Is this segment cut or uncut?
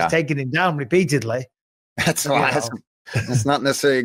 uncut